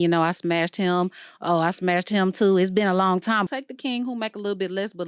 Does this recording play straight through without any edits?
no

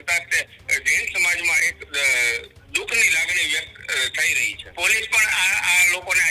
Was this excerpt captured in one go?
no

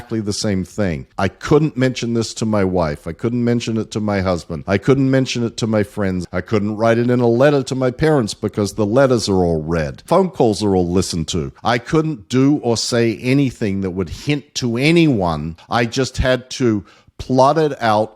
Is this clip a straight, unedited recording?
no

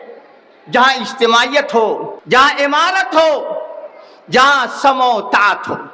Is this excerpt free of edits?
no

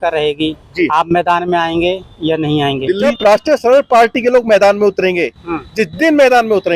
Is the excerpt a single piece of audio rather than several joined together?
no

